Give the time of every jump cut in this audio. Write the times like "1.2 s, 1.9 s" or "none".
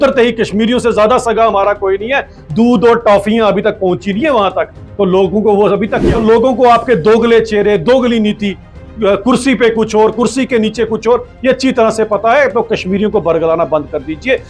6.0 s